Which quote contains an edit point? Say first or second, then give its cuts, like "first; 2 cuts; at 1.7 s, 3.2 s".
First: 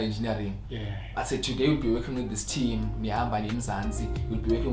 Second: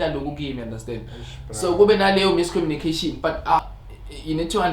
second; 1 cut; at 3.7 s